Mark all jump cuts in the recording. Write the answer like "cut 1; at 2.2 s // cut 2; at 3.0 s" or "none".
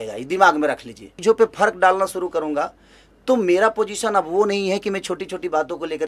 cut 1; at 1.1 s